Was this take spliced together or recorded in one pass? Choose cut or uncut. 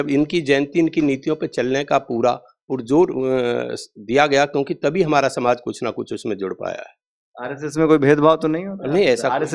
uncut